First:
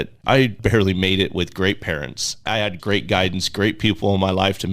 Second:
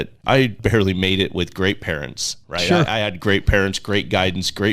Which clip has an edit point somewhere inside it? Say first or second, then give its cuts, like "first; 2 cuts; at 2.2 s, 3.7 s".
first; 1 cut; at 2.7 s